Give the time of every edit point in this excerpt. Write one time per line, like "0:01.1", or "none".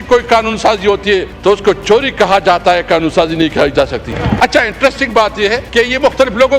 0:01.3
0:04.2
0:05.6